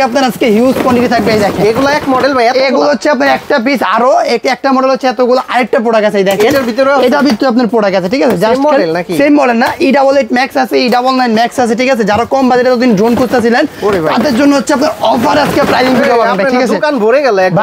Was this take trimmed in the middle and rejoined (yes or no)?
no